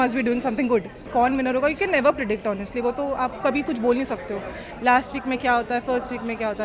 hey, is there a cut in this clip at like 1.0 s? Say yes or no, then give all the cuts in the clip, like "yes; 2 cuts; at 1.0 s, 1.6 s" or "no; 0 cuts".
yes; 1 cut; at 1.0 s